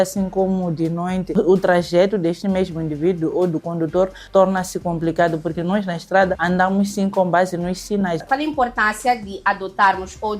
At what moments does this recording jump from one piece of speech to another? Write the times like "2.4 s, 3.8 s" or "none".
8.2 s